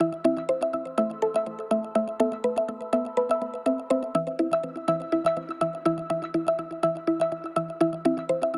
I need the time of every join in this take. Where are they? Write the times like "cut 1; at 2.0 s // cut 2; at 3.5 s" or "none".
none